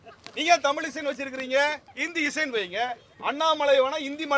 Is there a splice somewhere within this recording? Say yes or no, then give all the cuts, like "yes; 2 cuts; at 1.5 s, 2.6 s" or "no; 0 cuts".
yes; 2 cuts; at 1.9 s, 3.1 s